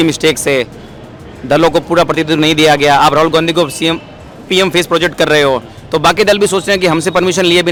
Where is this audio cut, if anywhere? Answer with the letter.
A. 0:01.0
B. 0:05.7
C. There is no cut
C